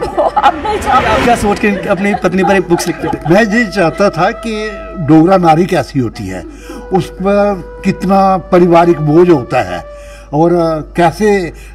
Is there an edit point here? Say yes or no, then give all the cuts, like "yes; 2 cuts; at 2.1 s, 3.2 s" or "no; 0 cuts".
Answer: yes; 1 cut; at 1.1 s